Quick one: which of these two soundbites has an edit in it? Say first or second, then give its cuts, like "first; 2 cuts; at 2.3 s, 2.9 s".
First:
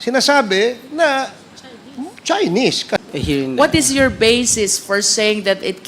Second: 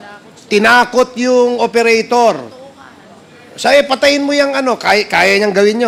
first; 1 cut; at 3.0 s